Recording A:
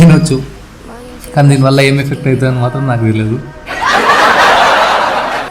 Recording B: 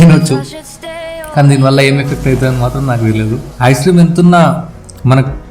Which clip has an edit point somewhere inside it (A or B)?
B